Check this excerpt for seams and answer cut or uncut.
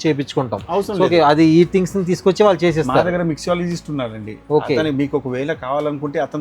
uncut